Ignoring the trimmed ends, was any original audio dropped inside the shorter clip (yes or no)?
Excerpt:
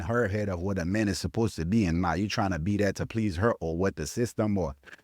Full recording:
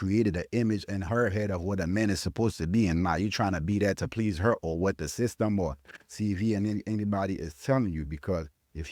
no